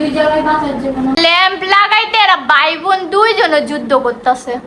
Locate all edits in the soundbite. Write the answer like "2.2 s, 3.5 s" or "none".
1.2 s